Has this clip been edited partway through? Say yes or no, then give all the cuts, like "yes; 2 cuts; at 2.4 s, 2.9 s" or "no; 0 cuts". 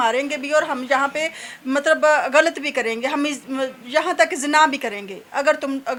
no; 0 cuts